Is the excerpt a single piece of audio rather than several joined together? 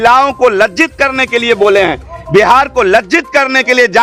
yes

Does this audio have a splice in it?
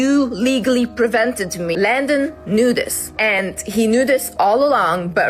yes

